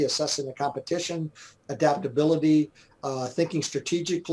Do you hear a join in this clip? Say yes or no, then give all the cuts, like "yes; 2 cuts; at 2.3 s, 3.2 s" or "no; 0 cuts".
no; 0 cuts